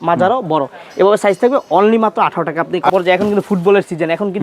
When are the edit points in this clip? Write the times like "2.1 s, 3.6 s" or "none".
2.9 s